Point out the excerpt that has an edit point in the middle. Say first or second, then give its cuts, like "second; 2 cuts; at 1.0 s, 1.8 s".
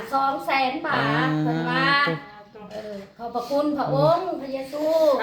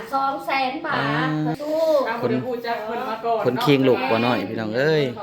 second; 1 cut; at 1.6 s